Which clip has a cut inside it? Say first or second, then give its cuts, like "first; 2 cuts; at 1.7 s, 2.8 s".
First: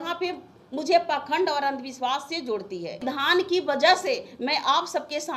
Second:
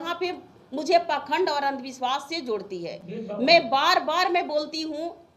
first; 1 cut; at 3.0 s